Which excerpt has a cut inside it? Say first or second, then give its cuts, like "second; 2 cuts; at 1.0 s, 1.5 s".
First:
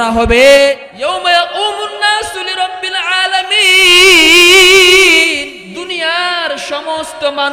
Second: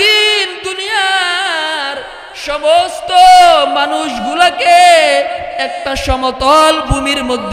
first; 2 cuts; at 0.9 s, 5.5 s